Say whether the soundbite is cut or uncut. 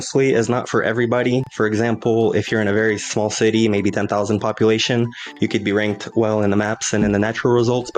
uncut